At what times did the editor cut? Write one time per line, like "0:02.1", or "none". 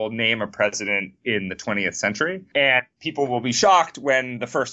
0:02.4
0:03.0